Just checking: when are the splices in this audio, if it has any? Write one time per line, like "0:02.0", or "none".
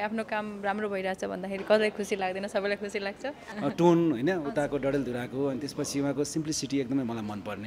0:03.4